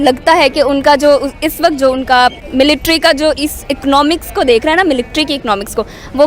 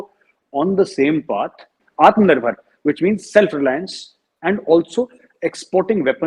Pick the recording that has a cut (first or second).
first